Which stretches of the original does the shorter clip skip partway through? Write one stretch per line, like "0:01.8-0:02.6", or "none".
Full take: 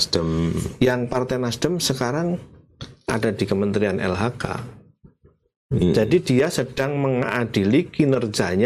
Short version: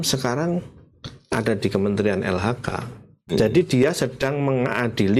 0:05.1-0:05.9